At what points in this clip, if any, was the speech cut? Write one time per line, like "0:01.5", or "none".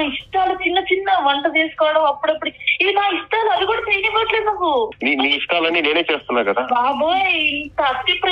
0:04.9